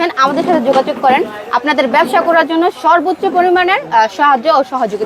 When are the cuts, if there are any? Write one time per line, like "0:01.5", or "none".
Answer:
none